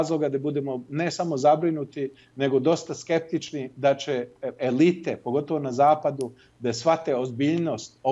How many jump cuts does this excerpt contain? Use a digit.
0